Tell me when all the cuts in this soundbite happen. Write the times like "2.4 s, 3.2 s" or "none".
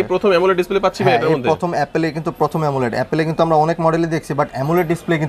none